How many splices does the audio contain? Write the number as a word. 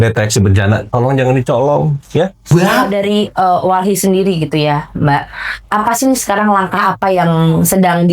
one